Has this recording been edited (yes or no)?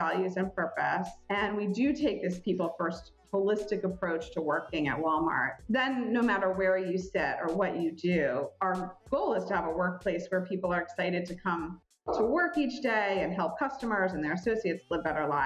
no